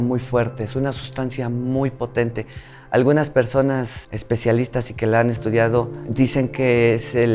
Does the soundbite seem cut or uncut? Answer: uncut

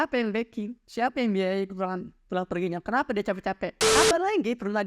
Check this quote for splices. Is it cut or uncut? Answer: cut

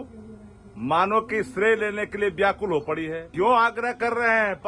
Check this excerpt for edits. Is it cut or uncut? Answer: cut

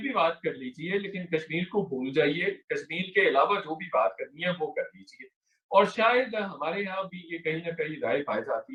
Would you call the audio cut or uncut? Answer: uncut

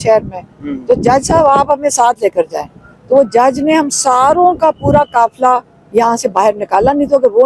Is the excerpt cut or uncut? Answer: uncut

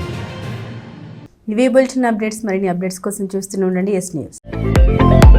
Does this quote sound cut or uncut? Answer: uncut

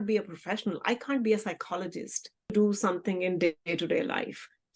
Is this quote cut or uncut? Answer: cut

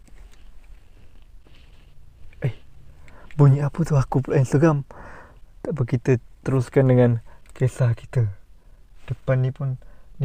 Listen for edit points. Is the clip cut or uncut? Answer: uncut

